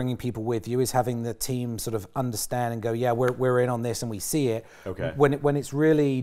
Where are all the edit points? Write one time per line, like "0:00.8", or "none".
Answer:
none